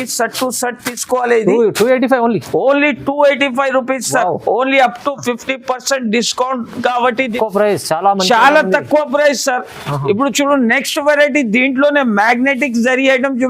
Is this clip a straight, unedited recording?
no; 1 cut; at 7.3 s

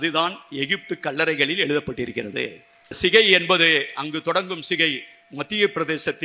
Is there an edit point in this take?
yes; 1 cut; at 3.0 s

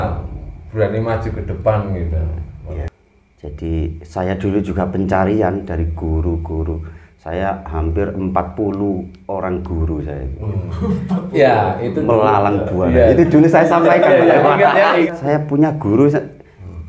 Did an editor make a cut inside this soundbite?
yes; 2 cuts; at 2.9 s, 15.1 s

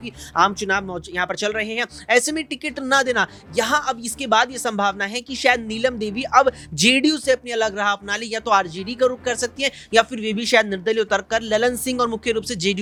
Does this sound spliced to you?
no; 0 cuts

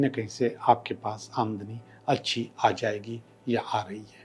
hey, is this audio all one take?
yes; 0 cuts

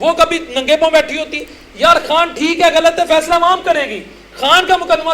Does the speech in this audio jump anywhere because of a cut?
no; 0 cuts

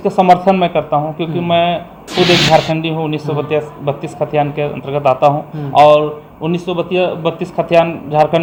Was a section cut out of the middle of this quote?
no; 0 cuts

